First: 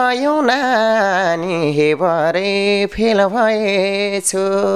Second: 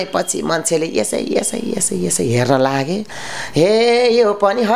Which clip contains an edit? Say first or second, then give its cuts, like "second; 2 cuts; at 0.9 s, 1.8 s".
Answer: second; 1 cut; at 3.2 s